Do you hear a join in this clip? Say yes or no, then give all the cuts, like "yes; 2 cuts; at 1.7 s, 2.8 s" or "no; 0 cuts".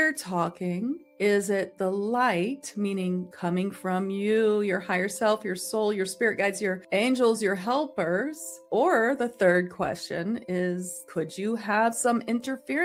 no; 0 cuts